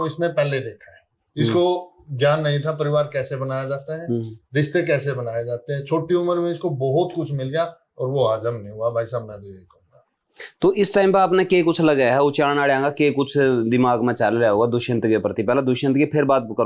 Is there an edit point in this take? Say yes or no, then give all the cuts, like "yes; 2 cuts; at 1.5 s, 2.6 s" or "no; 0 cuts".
no; 0 cuts